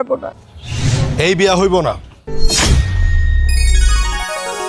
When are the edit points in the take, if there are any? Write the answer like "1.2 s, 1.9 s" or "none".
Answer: 1.0 s